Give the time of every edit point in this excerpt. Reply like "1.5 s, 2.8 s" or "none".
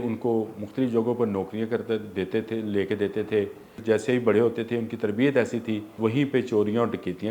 3.7 s, 5.9 s